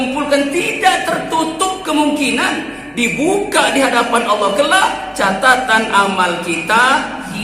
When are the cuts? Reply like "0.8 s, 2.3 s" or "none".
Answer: none